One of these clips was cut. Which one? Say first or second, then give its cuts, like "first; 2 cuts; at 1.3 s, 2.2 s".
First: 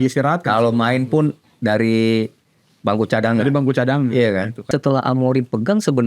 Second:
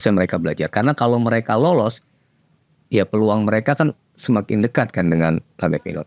first; 1 cut; at 4.7 s